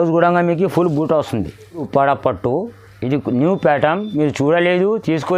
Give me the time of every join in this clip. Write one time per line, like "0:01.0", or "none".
0:01.8